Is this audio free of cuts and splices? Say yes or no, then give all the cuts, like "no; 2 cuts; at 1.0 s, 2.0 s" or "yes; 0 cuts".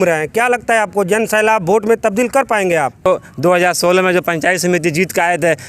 no; 1 cut; at 3.1 s